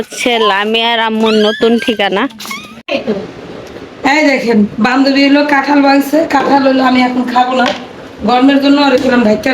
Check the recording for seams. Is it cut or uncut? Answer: cut